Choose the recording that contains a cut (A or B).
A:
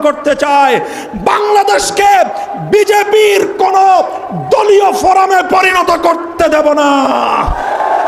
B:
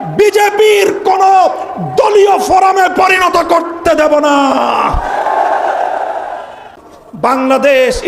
B